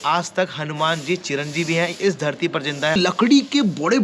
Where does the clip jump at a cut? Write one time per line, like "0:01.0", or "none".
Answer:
0:03.0